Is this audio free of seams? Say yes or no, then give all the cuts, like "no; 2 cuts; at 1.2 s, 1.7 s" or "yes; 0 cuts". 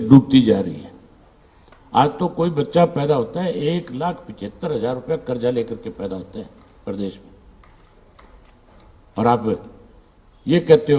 yes; 0 cuts